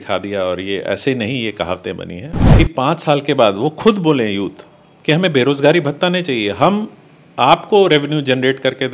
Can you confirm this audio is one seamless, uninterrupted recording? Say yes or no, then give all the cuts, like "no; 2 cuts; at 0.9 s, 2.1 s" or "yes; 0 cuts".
no; 1 cut; at 2.3 s